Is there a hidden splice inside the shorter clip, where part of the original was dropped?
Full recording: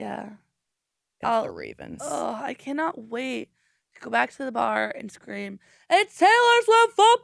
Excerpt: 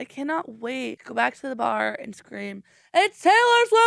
yes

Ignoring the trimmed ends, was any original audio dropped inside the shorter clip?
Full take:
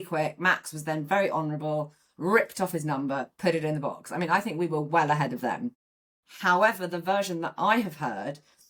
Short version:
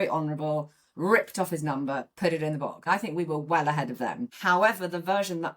yes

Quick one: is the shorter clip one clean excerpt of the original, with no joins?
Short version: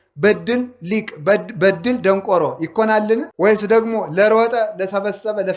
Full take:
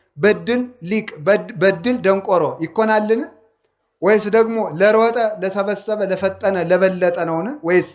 no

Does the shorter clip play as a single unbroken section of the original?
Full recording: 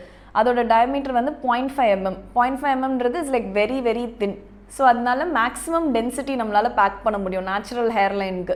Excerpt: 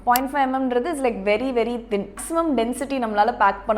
no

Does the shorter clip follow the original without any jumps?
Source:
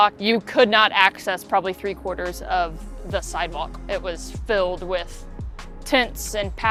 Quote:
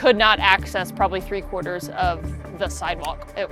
yes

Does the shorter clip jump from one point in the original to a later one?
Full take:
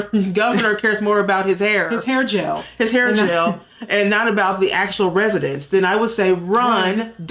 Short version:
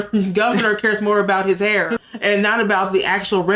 yes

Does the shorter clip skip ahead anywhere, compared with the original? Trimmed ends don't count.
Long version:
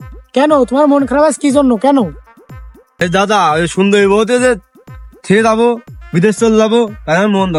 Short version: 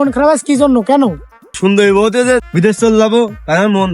yes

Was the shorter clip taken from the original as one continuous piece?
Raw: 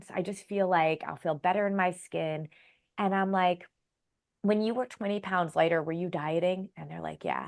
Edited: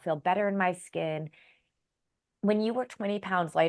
no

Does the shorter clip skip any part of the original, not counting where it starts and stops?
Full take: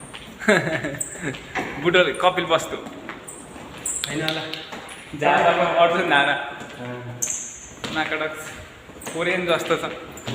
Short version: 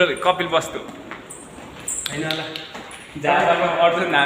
no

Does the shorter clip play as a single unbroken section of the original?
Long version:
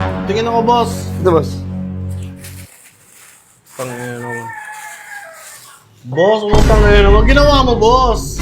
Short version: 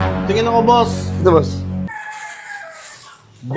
no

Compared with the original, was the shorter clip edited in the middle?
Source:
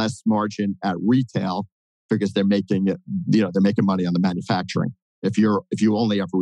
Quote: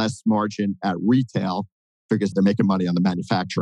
yes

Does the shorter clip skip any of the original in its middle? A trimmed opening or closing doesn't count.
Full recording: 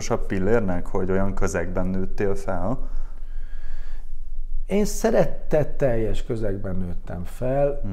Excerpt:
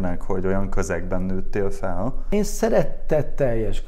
yes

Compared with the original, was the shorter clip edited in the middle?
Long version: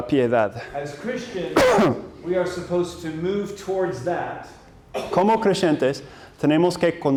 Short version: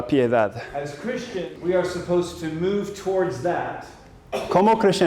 yes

